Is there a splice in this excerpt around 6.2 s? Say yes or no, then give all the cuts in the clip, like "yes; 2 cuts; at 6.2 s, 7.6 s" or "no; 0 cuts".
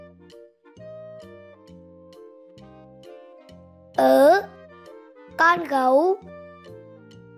yes; 2 cuts; at 3.3 s, 6.2 s